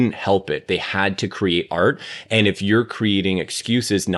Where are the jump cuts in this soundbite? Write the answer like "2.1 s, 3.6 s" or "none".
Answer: none